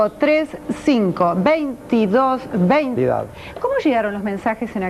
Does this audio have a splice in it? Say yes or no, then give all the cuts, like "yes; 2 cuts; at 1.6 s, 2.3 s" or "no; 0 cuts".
no; 0 cuts